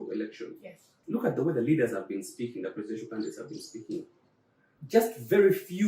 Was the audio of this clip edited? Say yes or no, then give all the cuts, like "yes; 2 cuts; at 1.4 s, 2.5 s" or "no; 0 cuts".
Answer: no; 0 cuts